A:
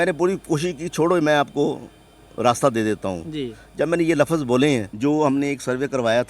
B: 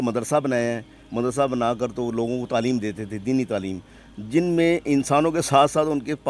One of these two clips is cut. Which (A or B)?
A